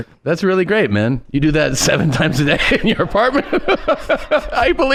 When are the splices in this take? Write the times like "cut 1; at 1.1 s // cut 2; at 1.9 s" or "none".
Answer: none